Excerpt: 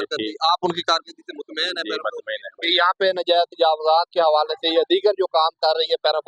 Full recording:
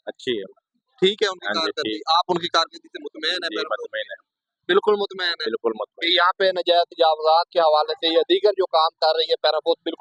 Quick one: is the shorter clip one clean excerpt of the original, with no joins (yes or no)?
no